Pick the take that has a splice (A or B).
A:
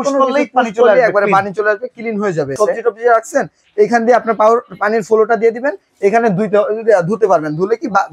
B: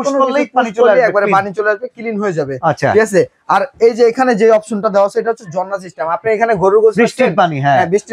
A